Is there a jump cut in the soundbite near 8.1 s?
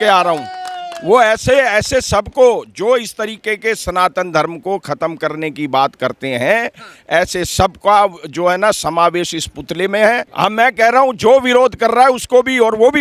no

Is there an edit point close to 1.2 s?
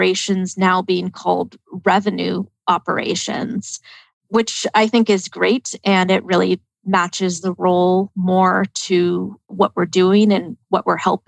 no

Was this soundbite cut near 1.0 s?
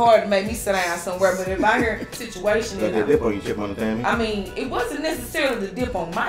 no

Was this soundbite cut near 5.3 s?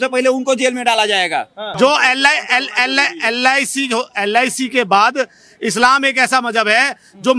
no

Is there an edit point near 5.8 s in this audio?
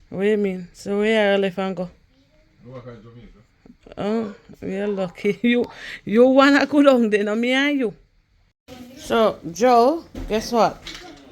no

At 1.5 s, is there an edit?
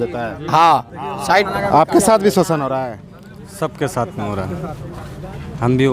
yes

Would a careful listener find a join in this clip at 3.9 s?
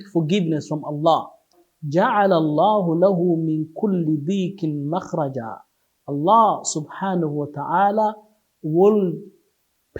no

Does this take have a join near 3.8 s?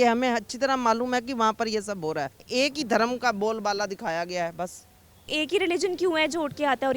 no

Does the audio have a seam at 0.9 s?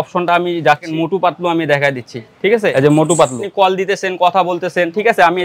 yes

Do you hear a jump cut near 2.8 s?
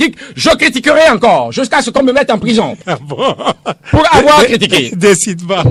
no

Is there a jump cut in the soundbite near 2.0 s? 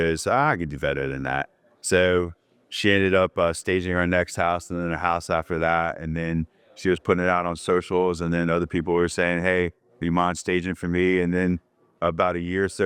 no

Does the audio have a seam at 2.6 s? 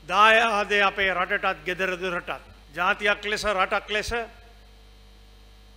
yes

